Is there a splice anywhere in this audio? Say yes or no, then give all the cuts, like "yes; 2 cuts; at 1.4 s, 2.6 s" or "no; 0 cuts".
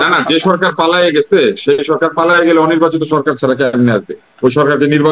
no; 0 cuts